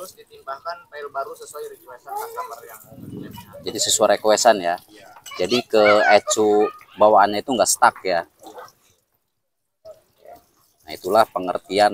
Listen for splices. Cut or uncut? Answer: uncut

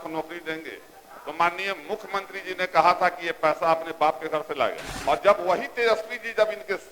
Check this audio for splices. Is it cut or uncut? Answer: cut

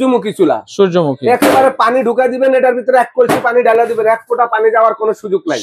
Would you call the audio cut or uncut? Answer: uncut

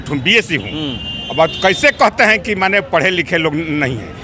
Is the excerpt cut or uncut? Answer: uncut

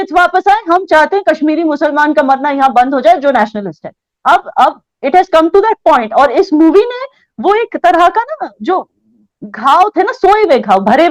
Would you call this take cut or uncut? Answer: uncut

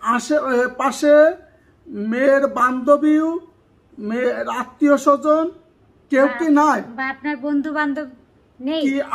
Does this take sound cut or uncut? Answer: uncut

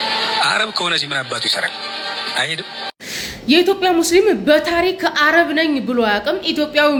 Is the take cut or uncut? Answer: uncut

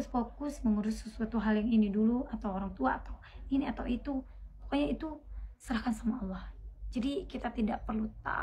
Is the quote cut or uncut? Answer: uncut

